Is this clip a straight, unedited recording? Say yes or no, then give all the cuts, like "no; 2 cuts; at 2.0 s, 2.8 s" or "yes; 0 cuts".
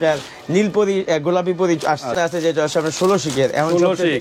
no; 1 cut; at 2.1 s